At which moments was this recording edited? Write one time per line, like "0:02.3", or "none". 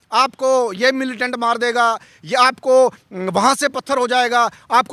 none